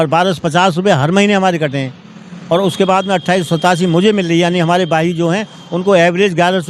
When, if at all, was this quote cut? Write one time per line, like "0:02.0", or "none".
none